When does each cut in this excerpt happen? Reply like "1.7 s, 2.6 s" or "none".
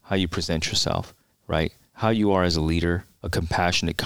1.7 s, 3.1 s

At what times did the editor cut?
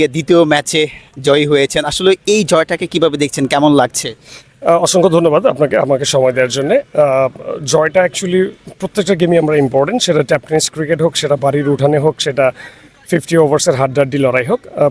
none

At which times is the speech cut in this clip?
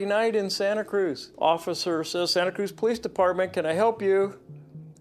1.3 s

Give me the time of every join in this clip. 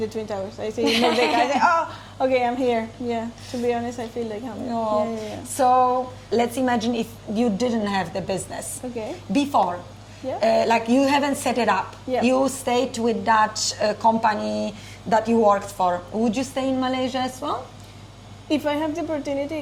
none

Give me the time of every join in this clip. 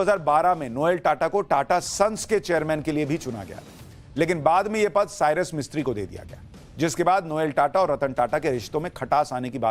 none

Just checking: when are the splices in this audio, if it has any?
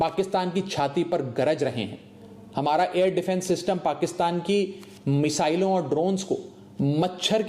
none

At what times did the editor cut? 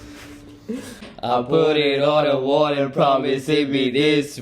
1.1 s

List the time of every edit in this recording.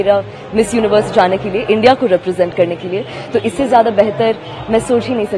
none

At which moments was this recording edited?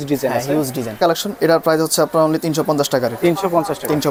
none

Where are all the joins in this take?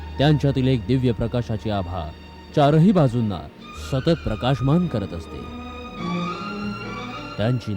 none

